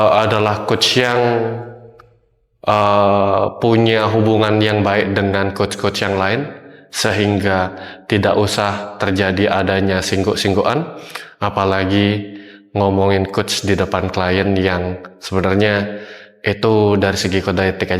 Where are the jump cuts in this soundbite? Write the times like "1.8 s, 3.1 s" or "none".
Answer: none

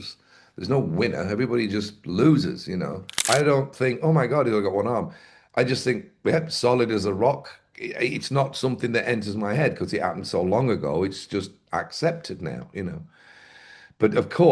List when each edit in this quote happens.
3.2 s

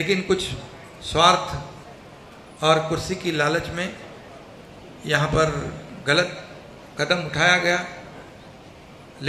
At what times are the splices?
none

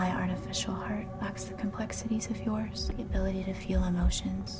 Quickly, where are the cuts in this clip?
1.1 s, 2.9 s

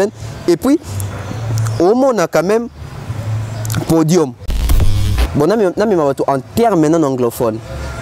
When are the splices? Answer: 4.9 s

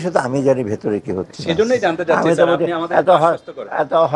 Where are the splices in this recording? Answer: none

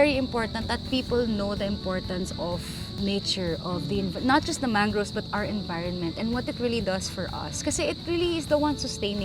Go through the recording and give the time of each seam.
none

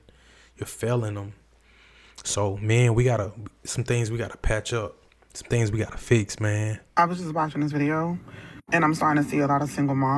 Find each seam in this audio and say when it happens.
6.8 s

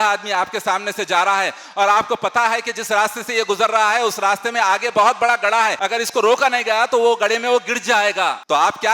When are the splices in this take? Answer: 5.8 s

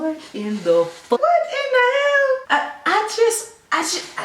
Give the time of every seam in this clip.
1.0 s

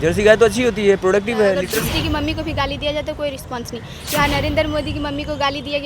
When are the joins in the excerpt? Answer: 1.5 s

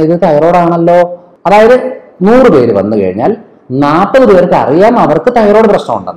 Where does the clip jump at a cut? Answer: 1.3 s

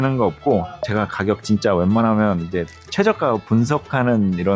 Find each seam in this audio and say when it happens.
none

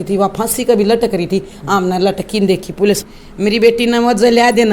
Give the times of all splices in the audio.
3.0 s

